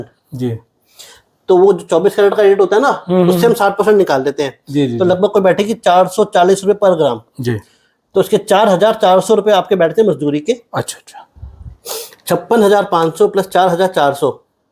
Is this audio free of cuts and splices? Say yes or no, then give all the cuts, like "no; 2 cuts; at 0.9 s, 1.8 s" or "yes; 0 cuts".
yes; 0 cuts